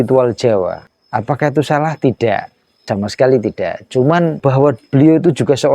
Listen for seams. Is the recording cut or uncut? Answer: cut